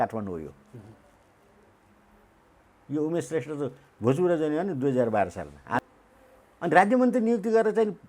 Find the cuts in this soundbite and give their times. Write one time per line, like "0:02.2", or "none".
0:05.8